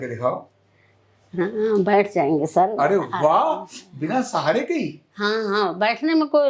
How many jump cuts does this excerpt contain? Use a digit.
0